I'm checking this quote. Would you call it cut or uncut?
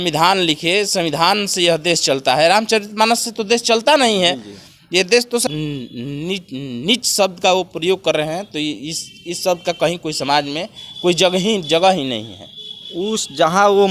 cut